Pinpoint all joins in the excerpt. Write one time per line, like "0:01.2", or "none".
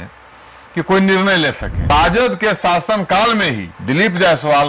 0:01.9
0:03.7